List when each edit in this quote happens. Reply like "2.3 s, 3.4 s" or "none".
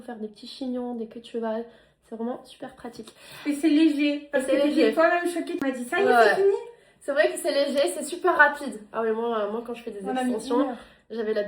5.6 s

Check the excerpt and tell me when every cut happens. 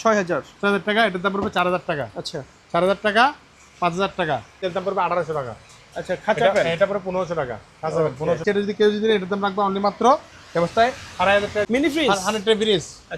4.6 s, 8.4 s, 11.6 s

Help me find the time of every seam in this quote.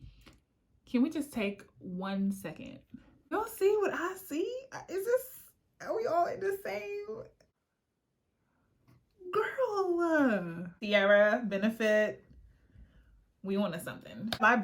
3.3 s, 10.8 s

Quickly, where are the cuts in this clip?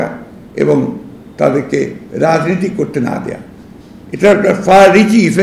none

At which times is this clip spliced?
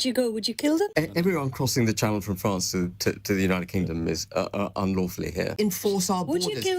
0.9 s, 5.5 s

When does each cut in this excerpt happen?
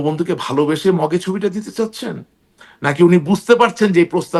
none

